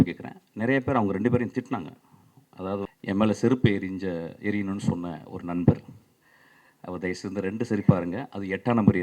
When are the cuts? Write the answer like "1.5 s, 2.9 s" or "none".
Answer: 2.9 s